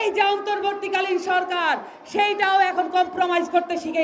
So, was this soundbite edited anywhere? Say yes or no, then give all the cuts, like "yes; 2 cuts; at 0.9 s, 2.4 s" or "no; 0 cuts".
no; 0 cuts